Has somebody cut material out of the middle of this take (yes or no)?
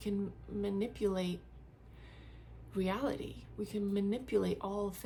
no